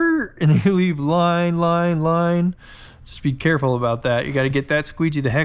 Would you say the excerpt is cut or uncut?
uncut